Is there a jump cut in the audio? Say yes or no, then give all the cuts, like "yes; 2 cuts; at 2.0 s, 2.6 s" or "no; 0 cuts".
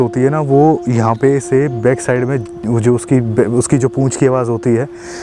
no; 0 cuts